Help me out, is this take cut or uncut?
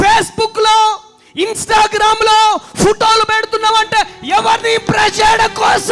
uncut